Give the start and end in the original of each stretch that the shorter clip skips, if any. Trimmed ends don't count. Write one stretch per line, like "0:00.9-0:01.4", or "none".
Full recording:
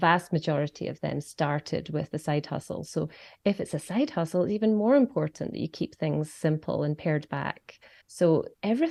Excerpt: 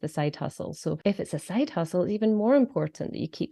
0:03.1-0:03.4